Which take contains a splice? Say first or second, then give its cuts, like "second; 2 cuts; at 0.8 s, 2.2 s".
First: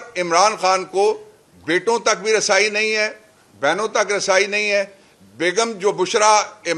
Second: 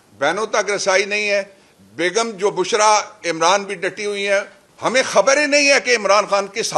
second; 1 cut; at 4.6 s